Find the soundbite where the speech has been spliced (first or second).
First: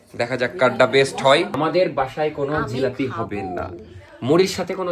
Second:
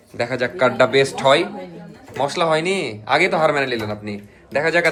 first